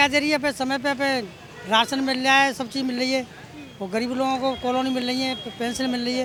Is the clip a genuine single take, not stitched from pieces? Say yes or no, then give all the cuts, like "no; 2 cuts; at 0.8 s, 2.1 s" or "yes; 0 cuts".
yes; 0 cuts